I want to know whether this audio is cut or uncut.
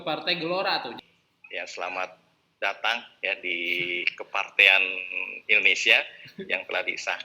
cut